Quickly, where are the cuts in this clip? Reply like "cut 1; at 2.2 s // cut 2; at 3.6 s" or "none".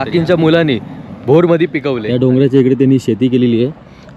cut 1; at 2.0 s